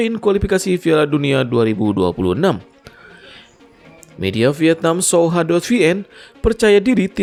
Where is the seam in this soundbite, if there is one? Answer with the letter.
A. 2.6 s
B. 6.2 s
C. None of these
C